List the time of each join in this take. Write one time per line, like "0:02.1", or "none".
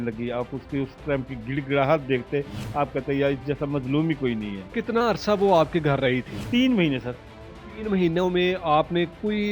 0:04.7
0:06.3